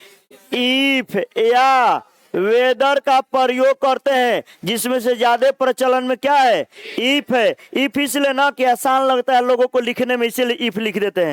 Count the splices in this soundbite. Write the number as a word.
zero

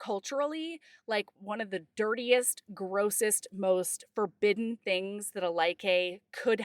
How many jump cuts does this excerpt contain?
one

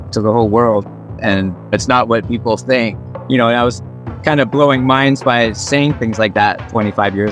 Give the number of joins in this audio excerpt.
zero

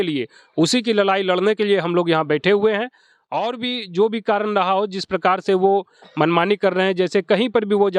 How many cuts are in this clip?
zero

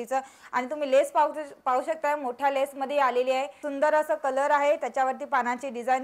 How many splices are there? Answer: one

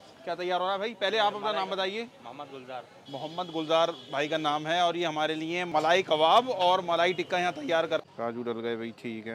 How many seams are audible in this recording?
two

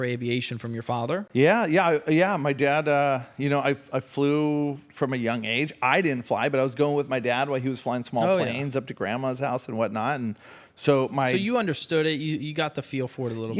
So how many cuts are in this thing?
zero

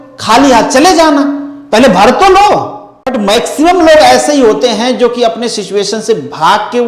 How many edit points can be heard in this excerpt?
one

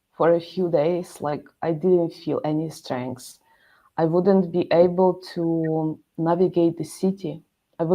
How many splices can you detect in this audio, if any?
zero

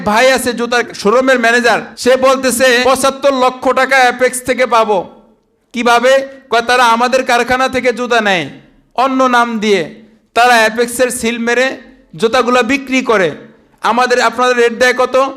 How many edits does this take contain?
three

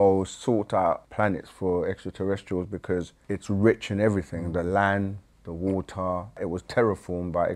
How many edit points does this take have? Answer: three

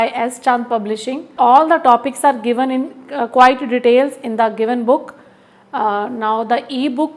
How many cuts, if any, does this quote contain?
one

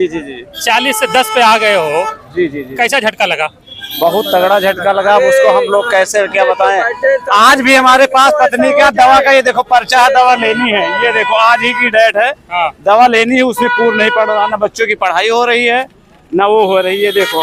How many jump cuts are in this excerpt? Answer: zero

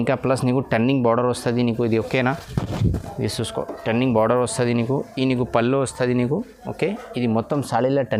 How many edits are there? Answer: zero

